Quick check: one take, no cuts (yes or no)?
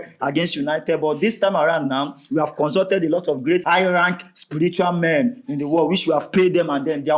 no